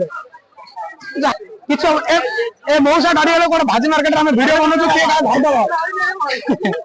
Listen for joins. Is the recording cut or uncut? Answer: cut